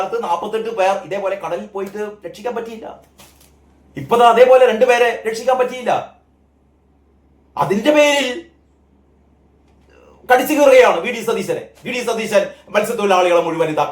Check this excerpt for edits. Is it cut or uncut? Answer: uncut